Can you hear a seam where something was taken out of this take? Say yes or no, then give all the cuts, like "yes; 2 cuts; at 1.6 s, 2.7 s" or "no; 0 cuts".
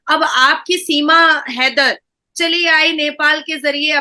no; 0 cuts